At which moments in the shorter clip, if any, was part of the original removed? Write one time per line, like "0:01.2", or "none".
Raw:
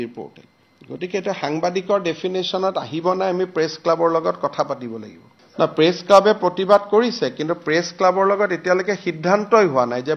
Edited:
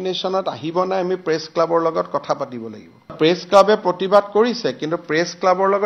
0:03.1